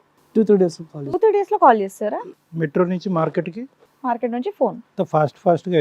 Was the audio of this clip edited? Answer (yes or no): yes